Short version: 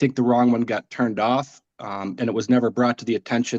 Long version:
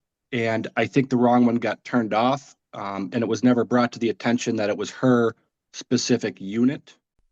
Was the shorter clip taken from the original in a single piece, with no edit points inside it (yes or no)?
yes